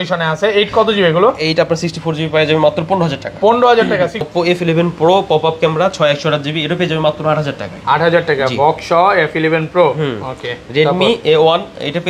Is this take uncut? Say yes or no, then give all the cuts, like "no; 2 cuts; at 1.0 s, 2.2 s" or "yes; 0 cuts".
no; 1 cut; at 4.3 s